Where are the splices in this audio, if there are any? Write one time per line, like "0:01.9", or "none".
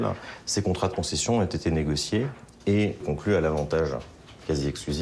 0:03.0